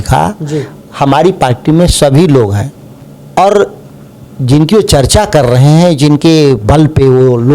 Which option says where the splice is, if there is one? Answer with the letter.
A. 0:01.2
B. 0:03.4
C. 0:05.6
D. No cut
B